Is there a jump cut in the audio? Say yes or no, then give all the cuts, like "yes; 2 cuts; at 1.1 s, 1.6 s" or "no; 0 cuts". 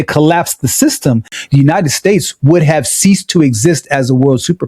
yes; 1 cut; at 1.3 s